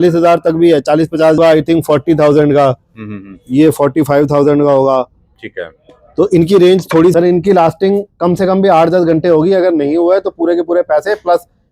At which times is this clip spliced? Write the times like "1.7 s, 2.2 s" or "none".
1.4 s, 7.1 s